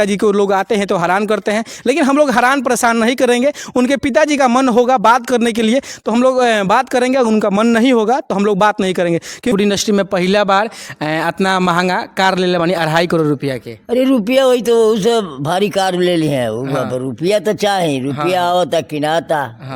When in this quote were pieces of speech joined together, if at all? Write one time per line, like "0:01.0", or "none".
0:09.5